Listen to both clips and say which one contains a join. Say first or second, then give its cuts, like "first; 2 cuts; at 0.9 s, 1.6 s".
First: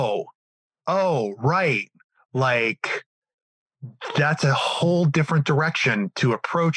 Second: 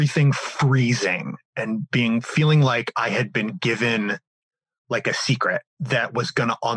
second; 1 cut; at 5.7 s